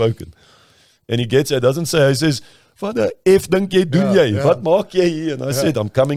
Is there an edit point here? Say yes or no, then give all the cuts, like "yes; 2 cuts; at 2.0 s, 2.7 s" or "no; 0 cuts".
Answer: no; 0 cuts